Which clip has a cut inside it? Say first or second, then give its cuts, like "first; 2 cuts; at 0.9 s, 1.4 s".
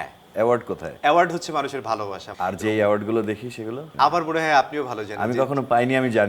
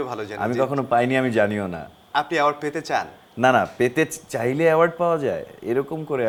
first; 3 cuts; at 0.9 s, 2.2 s, 3.9 s